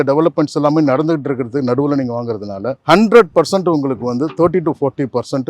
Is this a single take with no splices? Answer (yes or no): yes